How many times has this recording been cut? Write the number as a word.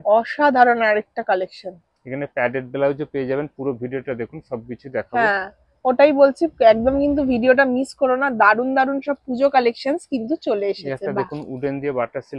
zero